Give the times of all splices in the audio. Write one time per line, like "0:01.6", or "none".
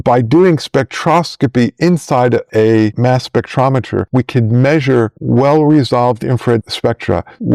none